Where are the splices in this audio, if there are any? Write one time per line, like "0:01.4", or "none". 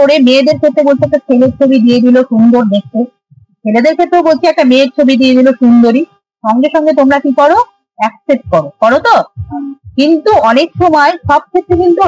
none

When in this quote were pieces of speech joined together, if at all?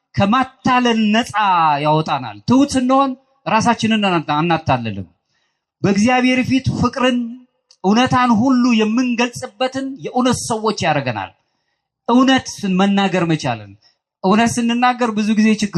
none

